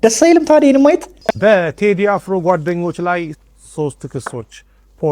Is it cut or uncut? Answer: cut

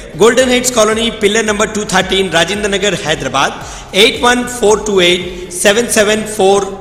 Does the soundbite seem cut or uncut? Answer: uncut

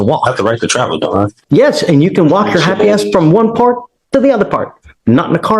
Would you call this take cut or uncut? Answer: cut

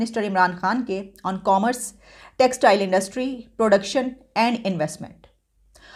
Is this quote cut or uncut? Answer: uncut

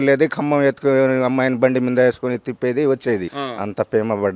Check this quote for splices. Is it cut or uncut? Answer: cut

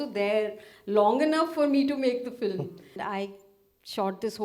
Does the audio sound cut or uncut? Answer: cut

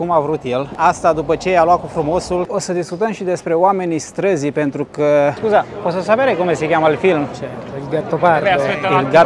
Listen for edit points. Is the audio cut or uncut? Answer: cut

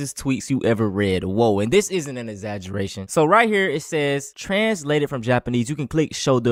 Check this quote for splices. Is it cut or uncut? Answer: uncut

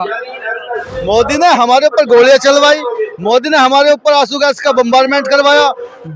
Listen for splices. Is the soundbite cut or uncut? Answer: cut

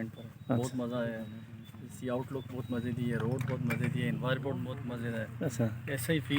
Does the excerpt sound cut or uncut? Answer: uncut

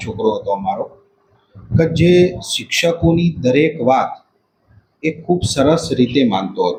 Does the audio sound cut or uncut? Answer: uncut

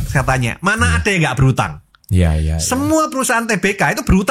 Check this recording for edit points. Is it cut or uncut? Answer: uncut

